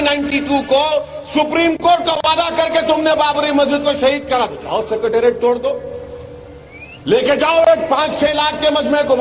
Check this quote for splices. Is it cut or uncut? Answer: uncut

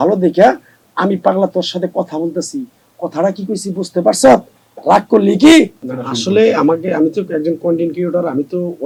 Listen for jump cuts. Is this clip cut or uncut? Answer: uncut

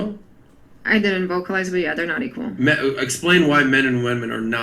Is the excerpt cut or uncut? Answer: uncut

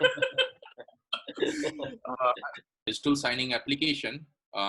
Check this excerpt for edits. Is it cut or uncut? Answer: cut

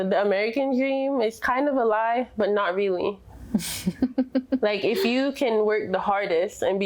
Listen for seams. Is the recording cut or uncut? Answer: uncut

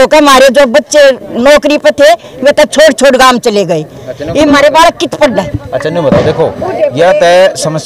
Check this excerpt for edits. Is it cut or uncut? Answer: uncut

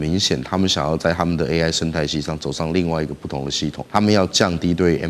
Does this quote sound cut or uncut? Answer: cut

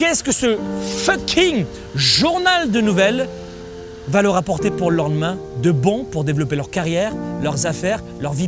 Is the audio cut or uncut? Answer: uncut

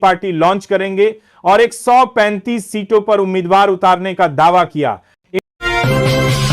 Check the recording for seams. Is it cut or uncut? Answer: cut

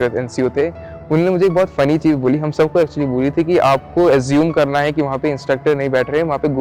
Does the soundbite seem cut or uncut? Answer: uncut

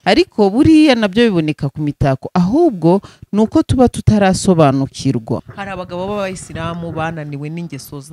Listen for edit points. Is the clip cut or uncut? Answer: cut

